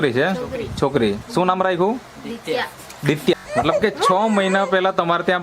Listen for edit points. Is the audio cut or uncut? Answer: cut